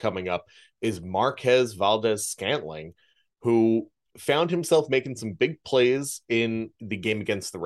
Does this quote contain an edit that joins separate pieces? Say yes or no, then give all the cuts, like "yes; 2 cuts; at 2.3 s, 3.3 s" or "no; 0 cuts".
yes; 2 cuts; at 4.1 s, 6.8 s